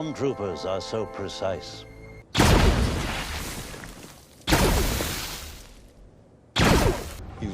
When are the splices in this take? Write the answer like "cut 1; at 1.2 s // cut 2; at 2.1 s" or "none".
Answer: cut 1; at 1.8 s